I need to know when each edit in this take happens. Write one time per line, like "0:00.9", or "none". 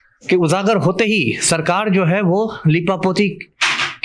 none